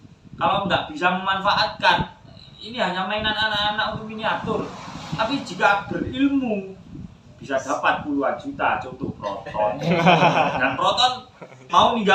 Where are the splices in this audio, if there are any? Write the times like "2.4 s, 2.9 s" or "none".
none